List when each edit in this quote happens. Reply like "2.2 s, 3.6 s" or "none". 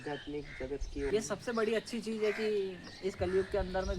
1.1 s